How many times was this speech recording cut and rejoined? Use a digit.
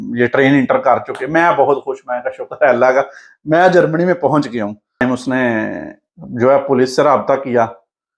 1